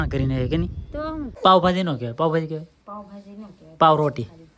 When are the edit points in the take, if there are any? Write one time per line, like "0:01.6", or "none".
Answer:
0:01.2